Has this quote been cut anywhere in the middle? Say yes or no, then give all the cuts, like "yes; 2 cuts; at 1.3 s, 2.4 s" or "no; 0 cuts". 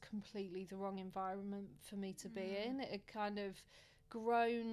no; 0 cuts